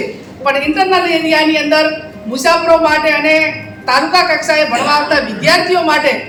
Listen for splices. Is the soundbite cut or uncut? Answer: uncut